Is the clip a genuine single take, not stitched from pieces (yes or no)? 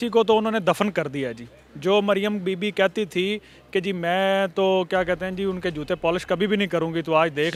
yes